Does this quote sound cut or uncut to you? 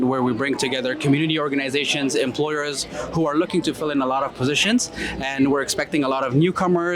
uncut